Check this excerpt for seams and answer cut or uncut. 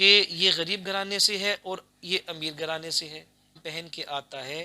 cut